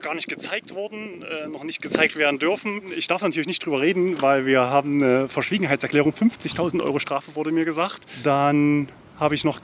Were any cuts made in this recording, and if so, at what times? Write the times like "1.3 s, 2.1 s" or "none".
2.9 s, 8.0 s